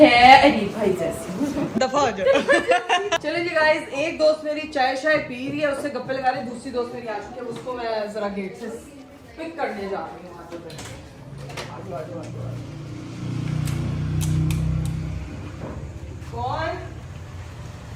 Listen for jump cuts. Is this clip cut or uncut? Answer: uncut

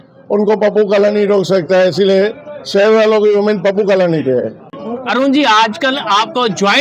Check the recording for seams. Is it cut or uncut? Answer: uncut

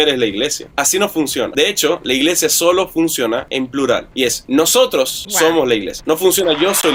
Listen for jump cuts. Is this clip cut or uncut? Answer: uncut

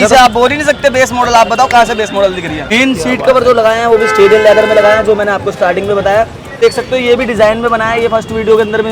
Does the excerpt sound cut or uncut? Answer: cut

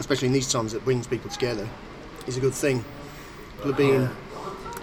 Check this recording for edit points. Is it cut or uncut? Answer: cut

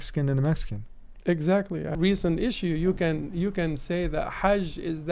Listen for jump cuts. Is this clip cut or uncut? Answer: cut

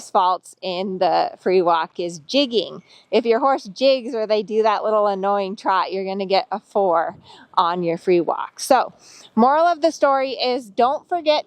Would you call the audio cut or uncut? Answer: cut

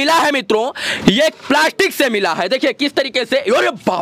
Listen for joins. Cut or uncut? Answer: uncut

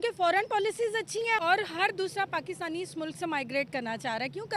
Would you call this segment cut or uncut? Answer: cut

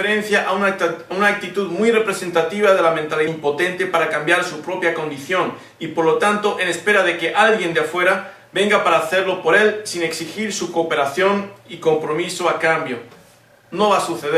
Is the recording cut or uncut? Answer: uncut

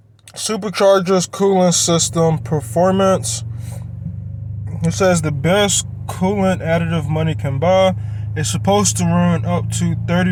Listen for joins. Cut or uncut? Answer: uncut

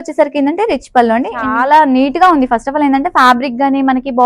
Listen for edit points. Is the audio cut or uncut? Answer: cut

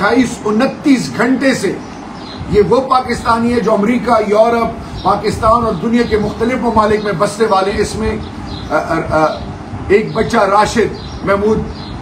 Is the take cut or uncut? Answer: uncut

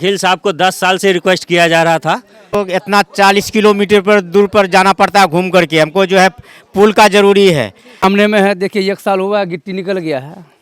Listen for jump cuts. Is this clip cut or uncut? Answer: cut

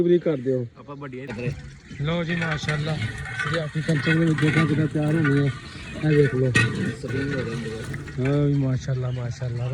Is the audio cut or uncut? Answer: cut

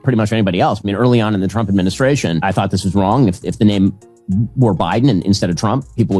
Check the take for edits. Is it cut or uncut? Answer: cut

